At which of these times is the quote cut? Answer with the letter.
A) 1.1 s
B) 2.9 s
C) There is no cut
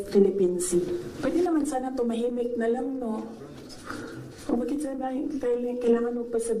A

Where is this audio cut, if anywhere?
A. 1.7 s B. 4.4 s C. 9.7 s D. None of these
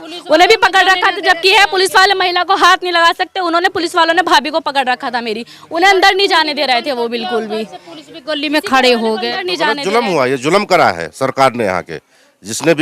C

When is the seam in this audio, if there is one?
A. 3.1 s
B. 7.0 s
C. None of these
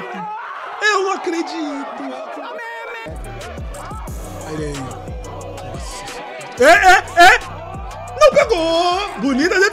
A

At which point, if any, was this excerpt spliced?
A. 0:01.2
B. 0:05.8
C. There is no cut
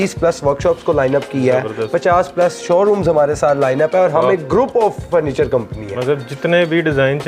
C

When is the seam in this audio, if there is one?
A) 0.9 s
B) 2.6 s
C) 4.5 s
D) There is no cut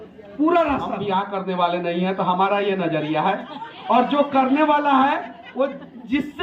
A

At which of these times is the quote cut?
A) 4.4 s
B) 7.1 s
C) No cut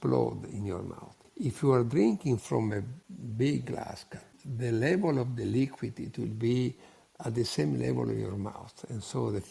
A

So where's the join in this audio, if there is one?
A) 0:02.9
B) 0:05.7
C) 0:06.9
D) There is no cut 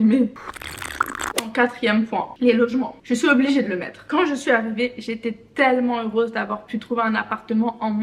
D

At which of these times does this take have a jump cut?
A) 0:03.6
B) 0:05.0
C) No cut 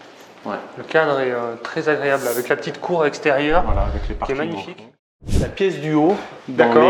B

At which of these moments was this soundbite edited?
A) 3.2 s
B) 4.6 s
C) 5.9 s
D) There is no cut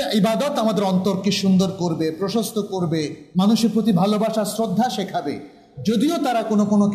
A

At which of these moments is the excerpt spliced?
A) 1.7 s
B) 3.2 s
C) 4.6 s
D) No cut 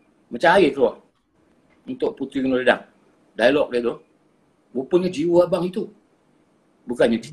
D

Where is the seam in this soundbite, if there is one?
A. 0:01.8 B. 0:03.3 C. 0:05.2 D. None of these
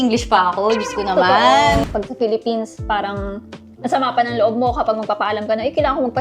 A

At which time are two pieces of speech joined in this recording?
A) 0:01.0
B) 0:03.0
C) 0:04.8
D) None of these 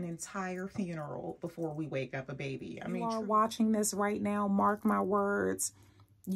B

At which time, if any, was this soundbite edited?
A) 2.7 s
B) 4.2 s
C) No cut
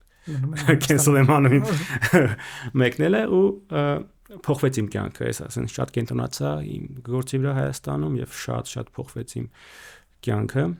C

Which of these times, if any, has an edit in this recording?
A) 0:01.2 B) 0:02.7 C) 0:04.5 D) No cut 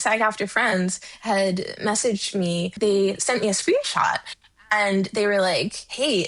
B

